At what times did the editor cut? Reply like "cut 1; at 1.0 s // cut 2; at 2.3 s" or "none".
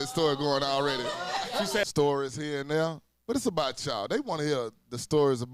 cut 1; at 1.9 s